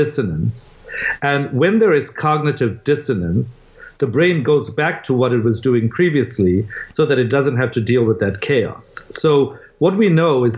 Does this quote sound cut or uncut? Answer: uncut